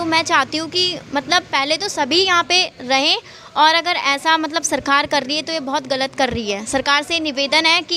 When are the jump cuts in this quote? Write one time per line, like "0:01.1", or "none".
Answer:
none